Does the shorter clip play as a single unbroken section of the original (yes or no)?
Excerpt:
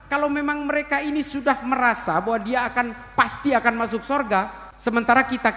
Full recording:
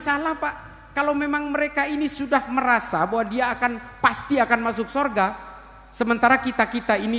no